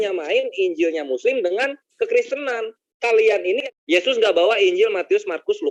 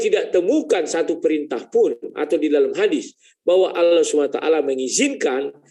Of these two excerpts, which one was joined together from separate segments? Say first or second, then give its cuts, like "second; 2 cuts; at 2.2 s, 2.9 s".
first; 1 cut; at 3.6 s